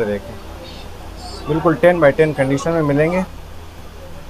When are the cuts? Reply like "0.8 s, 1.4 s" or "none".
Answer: 3.4 s